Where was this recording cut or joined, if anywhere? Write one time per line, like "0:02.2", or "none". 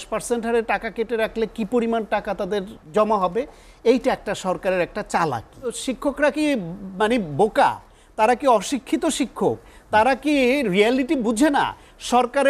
0:02.8
0:05.8